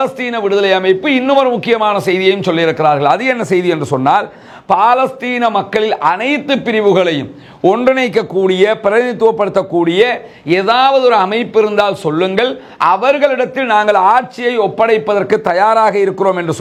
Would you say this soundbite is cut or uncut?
uncut